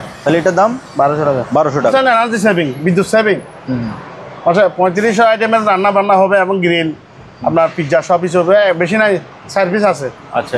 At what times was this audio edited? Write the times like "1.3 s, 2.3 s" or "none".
1.9 s